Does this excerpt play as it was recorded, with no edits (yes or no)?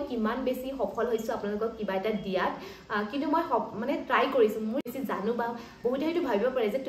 no